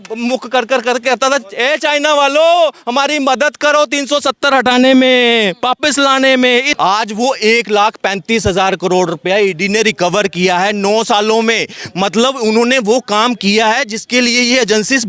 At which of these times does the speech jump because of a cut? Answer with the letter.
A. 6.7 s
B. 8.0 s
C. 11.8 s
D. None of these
A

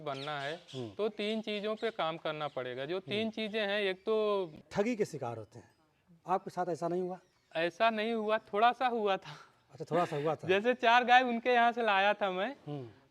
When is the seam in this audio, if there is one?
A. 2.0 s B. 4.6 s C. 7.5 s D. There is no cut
B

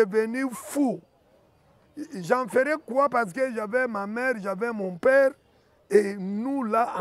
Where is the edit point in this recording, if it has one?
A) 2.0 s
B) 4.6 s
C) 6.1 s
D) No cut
D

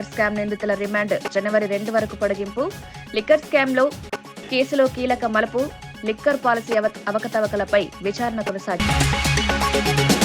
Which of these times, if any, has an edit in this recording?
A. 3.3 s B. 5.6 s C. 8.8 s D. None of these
C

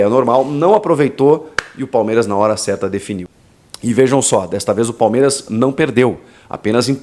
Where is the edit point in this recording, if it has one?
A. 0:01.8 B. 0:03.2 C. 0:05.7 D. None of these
B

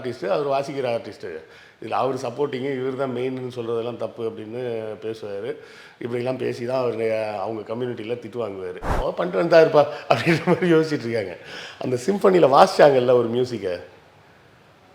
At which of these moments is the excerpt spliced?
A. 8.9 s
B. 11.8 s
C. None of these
A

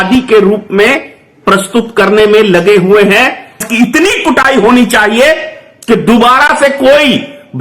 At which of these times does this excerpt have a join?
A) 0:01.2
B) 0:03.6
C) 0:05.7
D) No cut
B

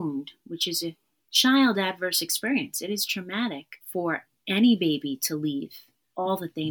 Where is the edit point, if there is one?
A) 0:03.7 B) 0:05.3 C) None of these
A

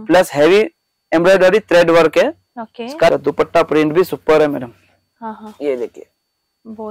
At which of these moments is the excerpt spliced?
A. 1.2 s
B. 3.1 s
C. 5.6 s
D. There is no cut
B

